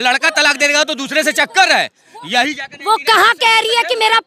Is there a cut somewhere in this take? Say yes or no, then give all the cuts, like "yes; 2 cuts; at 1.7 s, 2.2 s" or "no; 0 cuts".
no; 0 cuts